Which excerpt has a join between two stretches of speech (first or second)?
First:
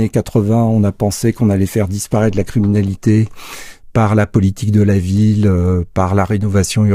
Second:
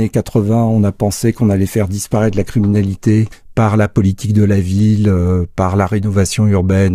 second